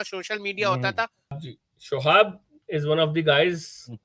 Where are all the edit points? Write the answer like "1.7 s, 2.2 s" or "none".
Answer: 1.4 s